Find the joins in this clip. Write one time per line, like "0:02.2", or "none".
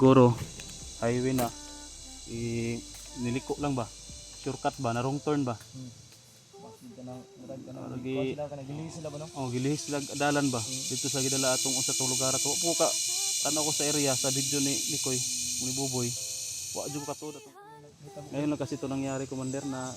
0:17.5